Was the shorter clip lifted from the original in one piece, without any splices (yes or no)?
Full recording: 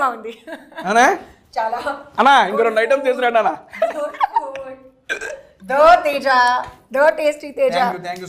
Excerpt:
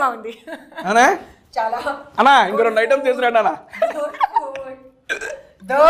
yes